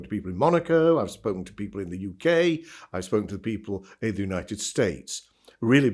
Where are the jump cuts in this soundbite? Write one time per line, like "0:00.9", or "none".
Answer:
none